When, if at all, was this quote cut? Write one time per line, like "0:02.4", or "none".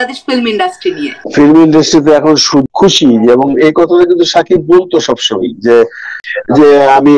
0:02.6
0:06.2